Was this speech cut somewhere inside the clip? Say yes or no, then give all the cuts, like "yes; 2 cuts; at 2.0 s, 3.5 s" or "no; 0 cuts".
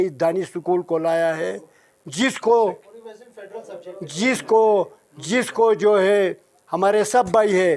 no; 0 cuts